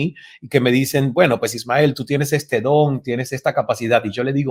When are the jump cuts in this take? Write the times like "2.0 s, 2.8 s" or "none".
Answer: none

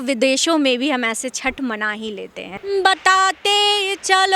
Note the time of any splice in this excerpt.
2.5 s

